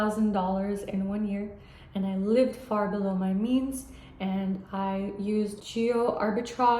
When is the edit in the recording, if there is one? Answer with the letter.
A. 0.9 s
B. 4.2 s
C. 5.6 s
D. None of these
C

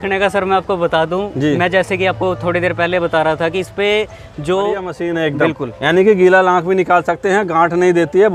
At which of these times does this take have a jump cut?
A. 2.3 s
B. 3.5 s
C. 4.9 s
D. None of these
C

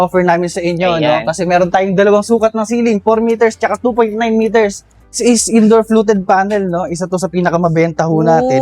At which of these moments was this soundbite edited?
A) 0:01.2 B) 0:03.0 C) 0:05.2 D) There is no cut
C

